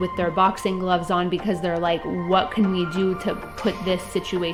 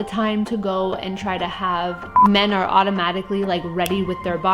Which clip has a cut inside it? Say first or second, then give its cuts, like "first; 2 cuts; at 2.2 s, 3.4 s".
second; 1 cut; at 2.1 s